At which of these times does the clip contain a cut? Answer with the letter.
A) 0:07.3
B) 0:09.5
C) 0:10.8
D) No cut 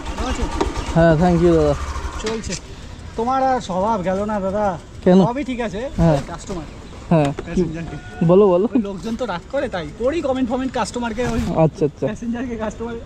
D